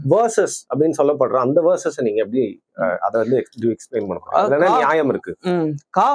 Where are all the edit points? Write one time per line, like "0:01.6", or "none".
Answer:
none